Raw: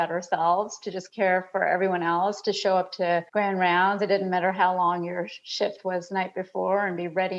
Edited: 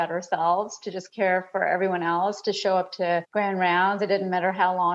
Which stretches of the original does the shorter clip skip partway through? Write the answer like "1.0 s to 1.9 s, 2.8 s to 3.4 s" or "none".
none